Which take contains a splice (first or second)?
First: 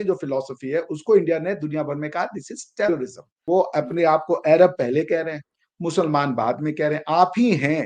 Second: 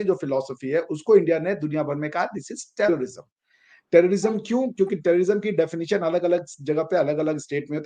first